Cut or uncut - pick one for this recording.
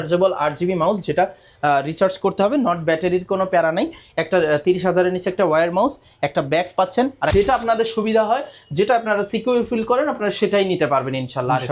cut